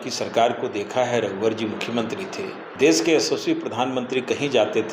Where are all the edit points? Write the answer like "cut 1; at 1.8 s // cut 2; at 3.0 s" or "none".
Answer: cut 1; at 2.6 s